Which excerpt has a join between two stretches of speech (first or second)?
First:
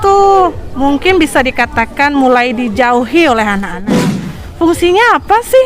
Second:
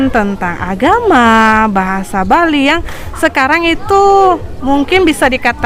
first